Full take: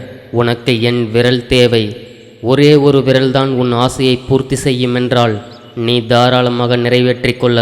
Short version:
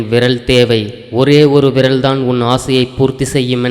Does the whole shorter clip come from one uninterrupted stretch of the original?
no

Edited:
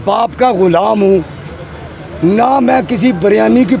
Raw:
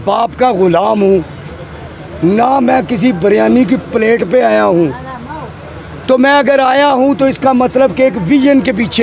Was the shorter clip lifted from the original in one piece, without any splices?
yes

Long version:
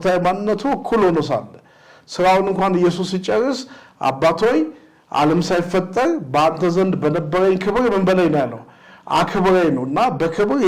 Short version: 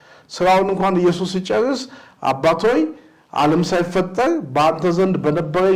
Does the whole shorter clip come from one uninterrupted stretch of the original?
yes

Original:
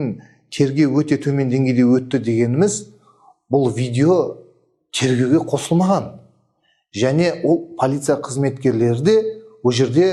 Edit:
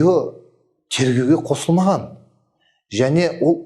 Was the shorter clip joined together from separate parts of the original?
no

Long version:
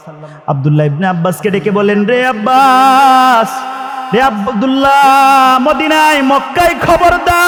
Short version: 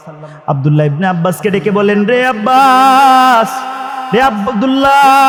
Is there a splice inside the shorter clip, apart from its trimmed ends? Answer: no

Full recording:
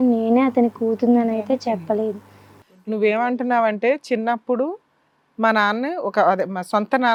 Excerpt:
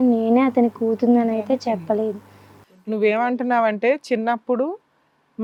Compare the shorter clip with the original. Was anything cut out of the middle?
no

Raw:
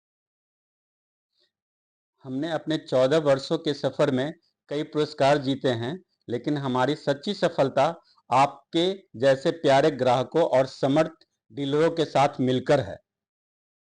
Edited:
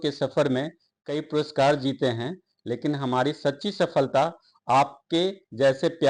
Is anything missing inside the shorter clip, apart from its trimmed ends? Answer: no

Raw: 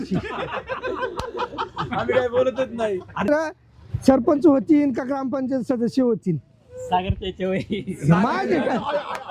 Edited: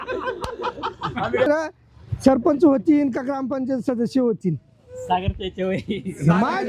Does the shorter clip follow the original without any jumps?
no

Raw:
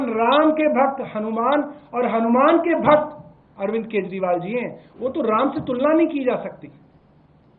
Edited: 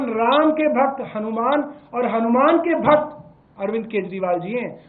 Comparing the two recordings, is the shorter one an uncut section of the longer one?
yes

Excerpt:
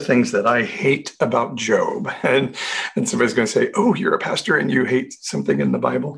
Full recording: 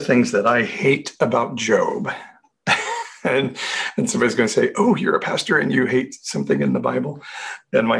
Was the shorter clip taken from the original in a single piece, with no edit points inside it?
no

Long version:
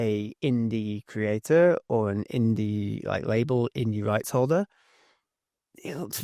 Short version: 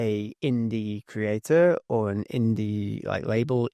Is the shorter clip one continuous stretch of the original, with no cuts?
yes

